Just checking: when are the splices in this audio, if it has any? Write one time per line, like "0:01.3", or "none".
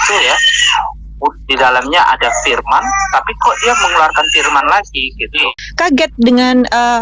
0:05.6